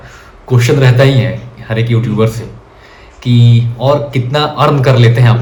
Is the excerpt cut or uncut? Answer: uncut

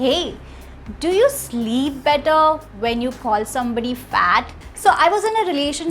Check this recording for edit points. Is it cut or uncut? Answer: cut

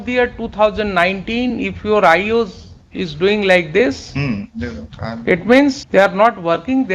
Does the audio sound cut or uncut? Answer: cut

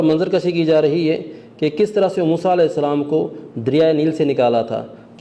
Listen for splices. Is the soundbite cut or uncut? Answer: uncut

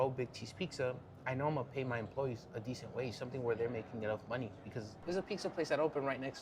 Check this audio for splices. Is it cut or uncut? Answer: cut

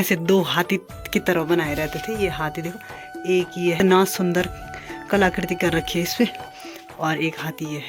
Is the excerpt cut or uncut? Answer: cut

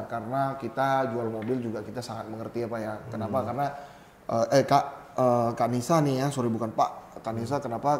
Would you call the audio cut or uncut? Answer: uncut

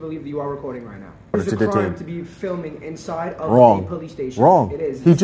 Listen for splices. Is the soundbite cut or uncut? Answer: cut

